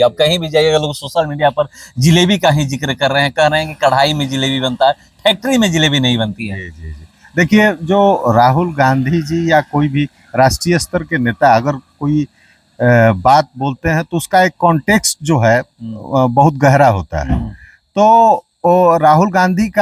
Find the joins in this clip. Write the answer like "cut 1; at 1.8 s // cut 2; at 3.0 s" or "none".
none